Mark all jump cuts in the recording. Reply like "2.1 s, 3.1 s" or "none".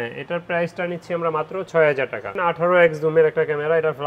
2.3 s